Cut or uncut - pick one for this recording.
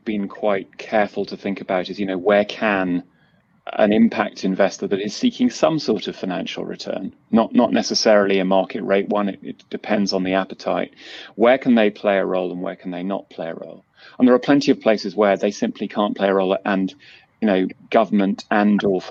uncut